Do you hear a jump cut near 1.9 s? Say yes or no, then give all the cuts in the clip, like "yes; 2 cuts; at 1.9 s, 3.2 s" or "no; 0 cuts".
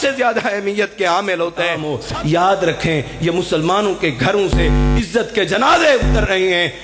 yes; 1 cut; at 1.9 s